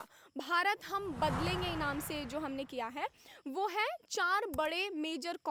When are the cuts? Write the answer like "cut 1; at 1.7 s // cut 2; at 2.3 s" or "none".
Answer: none

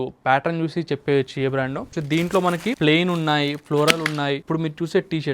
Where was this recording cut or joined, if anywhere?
cut 1; at 1.9 s // cut 2; at 2.8 s // cut 3; at 4.4 s

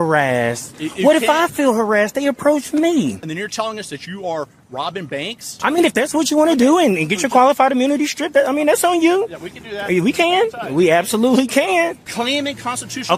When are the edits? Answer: cut 1; at 3.2 s // cut 2; at 5.5 s // cut 3; at 12.0 s

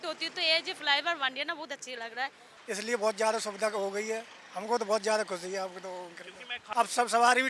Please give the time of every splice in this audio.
cut 1; at 2.5 s // cut 2; at 6.6 s

